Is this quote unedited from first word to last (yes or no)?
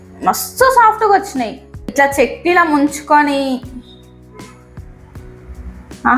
no